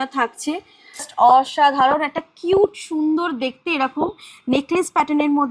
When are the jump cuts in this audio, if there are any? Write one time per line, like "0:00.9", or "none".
0:01.1